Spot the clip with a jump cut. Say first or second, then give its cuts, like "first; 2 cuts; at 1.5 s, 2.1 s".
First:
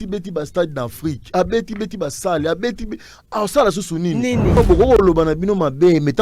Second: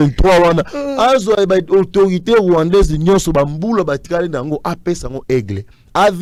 first; 1 cut; at 4.6 s